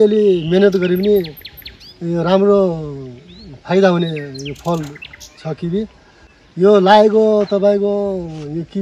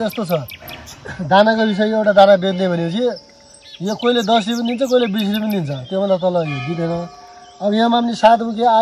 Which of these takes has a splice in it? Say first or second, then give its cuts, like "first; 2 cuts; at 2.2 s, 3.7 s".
first; 1 cut; at 5.9 s